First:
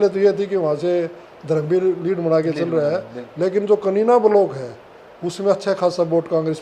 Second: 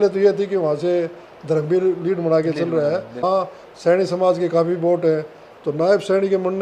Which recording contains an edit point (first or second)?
second